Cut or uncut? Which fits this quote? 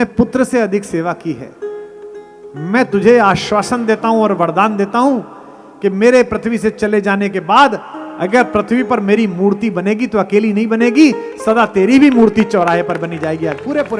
uncut